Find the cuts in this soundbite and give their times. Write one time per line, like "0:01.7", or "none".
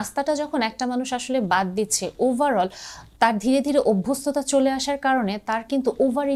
none